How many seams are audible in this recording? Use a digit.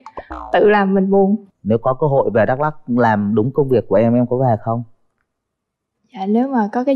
1